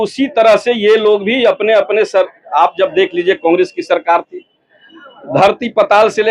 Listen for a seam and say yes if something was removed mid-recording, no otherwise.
no